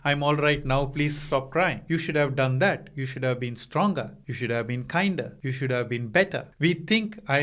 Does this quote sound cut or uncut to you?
cut